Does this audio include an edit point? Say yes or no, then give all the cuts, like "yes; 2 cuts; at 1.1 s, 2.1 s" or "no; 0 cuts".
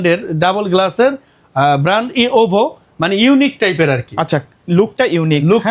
no; 0 cuts